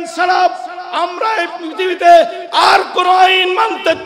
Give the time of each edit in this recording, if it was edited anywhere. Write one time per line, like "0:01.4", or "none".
0:01.5

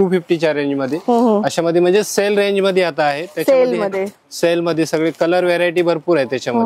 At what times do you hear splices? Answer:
none

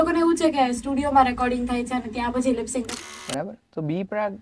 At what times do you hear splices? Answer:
0:03.1

